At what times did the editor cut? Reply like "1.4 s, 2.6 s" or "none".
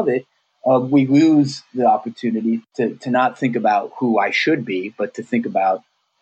2.7 s